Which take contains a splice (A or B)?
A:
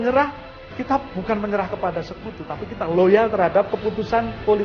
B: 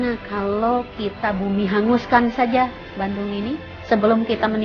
B